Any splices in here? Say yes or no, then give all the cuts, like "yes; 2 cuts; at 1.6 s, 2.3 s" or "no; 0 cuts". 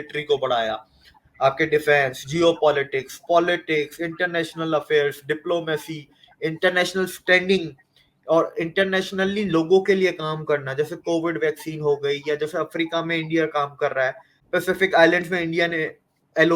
yes; 1 cut; at 14.3 s